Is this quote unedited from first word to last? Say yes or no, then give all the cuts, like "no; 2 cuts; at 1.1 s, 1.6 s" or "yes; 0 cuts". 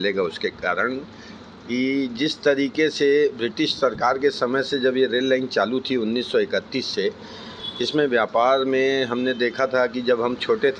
yes; 0 cuts